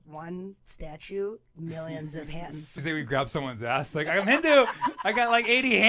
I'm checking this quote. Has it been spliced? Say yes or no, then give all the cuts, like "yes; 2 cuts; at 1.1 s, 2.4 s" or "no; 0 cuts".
yes; 1 cut; at 2.8 s